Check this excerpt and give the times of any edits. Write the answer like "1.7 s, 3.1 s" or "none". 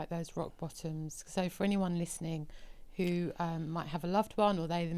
none